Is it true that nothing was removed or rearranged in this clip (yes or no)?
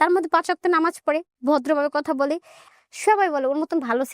no